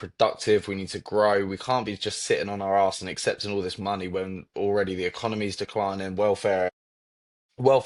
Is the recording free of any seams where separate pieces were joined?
yes; 0 cuts

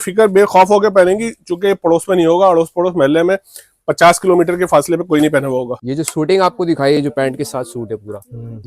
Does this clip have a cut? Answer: yes; 1 cut; at 5.8 s

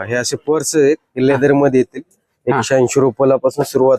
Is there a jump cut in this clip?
no; 0 cuts

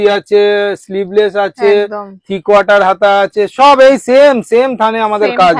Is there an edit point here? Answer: no; 0 cuts

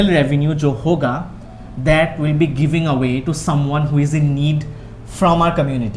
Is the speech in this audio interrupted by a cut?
no; 0 cuts

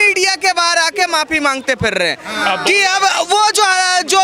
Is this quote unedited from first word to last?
yes; 0 cuts

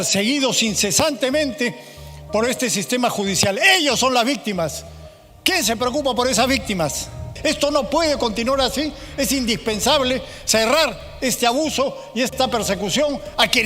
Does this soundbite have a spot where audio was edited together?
yes; 1 cut; at 7.3 s

